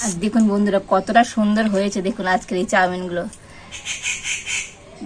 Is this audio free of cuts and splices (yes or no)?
yes